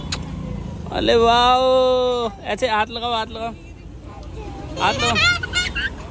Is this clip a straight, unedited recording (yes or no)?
yes